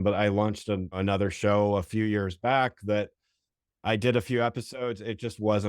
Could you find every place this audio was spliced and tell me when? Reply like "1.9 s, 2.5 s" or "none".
1.0 s